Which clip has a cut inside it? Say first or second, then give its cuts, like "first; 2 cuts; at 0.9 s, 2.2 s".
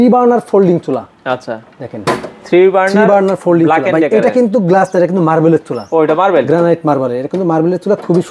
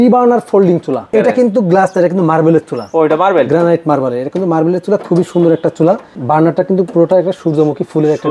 second; 2 cuts; at 1.1 s, 6.1 s